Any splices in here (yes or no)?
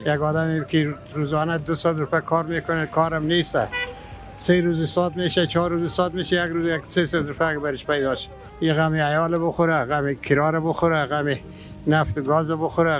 no